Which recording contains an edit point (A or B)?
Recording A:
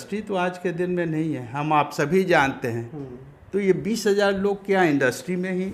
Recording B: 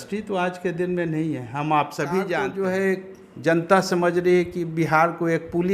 B